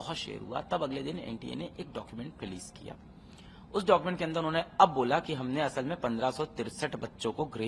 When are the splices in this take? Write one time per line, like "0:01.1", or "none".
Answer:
none